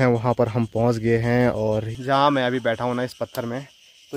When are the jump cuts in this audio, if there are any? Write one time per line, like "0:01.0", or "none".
0:01.9